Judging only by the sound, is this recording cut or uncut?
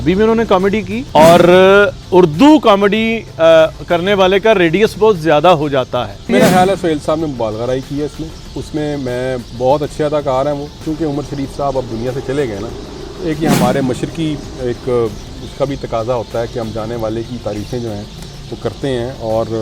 cut